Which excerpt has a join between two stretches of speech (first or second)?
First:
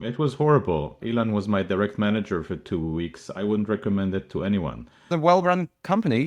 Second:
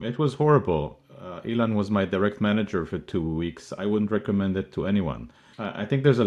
first